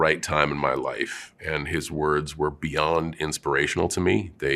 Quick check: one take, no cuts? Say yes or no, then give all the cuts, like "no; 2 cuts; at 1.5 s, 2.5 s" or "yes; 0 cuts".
yes; 0 cuts